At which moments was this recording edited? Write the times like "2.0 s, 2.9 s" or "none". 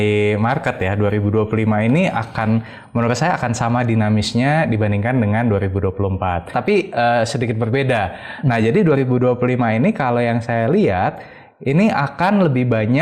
6.5 s